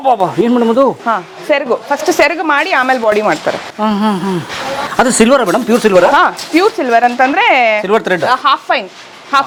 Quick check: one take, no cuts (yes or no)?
yes